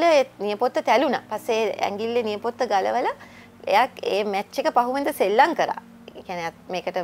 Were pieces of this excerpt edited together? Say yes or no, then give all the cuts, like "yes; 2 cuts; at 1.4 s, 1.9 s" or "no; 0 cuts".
no; 0 cuts